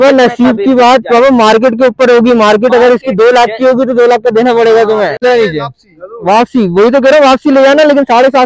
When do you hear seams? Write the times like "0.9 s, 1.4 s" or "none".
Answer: 5.2 s